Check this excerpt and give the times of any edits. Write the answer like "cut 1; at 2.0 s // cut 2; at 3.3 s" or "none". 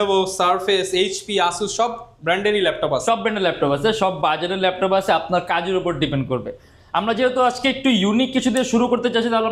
none